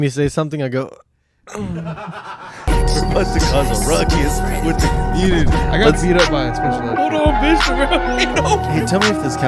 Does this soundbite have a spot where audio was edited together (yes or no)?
yes